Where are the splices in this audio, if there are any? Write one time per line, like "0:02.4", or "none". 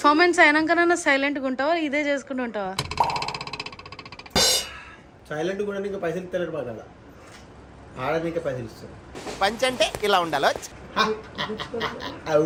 none